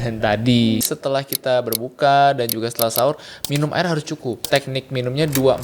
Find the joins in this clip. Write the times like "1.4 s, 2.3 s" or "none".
0.8 s, 4.4 s